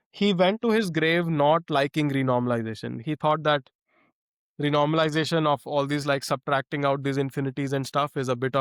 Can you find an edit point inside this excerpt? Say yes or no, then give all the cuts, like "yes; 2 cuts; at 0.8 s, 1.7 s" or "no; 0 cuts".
no; 0 cuts